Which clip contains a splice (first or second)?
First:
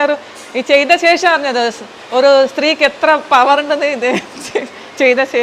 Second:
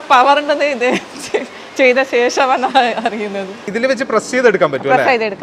second